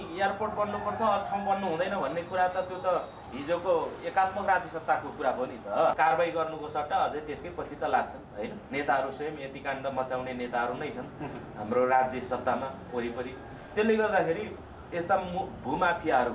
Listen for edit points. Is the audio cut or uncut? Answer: cut